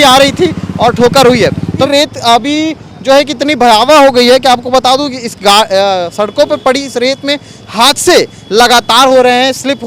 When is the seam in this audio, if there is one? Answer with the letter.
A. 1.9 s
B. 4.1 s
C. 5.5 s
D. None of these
A